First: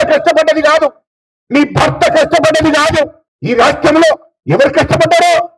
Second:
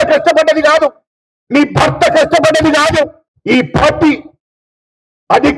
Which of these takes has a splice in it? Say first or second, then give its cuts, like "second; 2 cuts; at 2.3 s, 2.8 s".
first; 1 cut; at 3.3 s